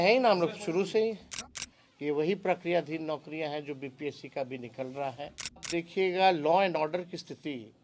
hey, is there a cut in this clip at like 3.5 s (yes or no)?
no